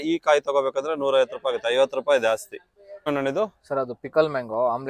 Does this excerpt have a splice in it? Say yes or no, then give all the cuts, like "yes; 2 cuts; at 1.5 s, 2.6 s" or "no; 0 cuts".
yes; 1 cut; at 3.1 s